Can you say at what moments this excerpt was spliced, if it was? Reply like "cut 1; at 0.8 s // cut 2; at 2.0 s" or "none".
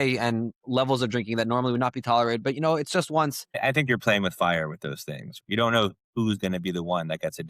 cut 1; at 3.6 s // cut 2; at 5.4 s